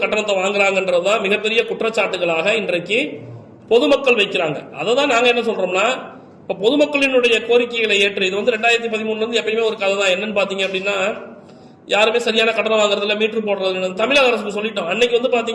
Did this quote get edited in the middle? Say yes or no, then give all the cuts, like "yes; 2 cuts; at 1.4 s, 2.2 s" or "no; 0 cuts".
no; 0 cuts